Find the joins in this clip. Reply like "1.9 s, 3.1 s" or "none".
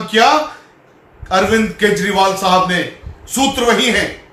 none